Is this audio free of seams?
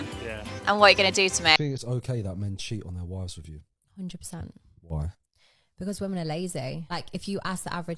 no; 1 cut; at 1.6 s

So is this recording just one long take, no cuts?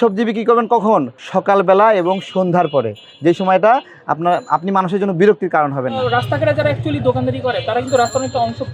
no; 2 cuts; at 1.2 s, 6.0 s

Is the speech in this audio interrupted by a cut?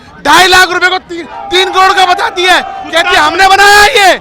no; 0 cuts

